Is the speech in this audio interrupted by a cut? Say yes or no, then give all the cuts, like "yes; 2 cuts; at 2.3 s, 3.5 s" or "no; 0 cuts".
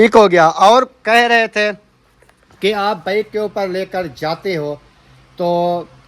no; 0 cuts